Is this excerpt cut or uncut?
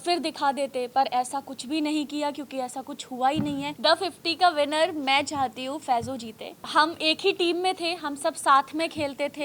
cut